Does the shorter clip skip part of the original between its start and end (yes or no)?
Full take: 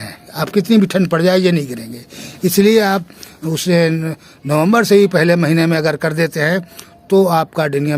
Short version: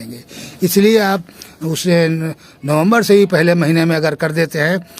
no